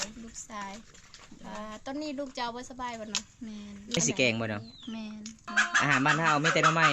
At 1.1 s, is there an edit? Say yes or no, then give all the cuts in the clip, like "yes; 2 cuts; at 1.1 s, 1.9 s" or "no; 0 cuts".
no; 2 cuts; at 4.0 s, 5.5 s